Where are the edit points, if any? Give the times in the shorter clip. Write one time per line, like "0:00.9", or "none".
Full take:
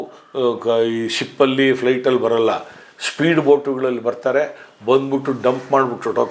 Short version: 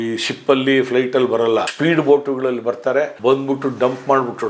0:01.7
0:03.1